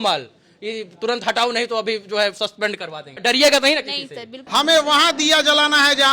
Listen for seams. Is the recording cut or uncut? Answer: cut